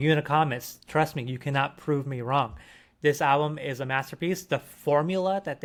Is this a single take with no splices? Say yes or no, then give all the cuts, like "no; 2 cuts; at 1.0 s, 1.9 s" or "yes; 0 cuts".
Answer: yes; 0 cuts